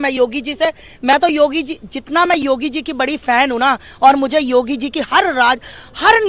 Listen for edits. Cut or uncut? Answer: uncut